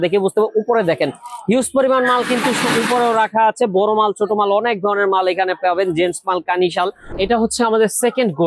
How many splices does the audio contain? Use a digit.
1